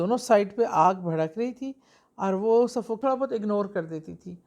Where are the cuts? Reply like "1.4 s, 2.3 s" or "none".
3.0 s